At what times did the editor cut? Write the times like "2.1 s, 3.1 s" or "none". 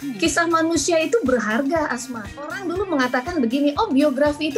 2.6 s